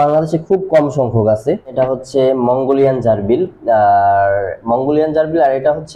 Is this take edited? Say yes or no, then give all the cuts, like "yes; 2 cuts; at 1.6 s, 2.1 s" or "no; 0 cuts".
yes; 1 cut; at 1.7 s